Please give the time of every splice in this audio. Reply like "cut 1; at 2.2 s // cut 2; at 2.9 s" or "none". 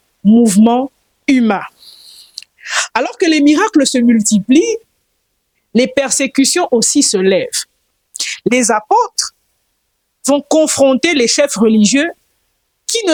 none